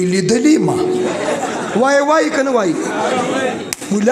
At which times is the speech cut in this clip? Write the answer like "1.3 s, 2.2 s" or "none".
1.1 s